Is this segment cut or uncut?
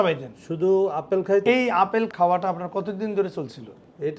cut